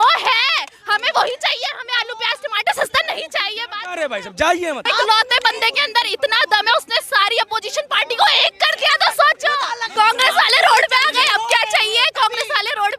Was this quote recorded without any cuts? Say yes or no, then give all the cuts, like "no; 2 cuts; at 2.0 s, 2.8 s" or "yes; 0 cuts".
no; 2 cuts; at 4.8 s, 9.9 s